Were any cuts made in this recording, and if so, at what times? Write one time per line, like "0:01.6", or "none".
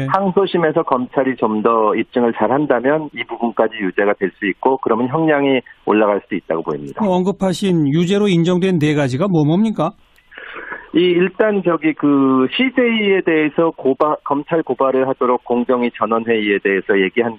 0:07.4